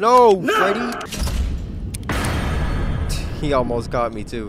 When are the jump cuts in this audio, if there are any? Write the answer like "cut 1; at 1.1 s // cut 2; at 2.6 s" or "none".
none